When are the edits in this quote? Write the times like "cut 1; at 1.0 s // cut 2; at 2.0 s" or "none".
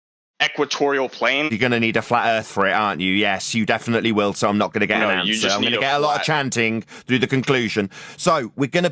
cut 1; at 1.5 s